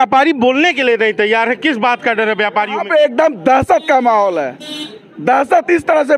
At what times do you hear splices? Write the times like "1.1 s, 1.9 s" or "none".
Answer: 2.8 s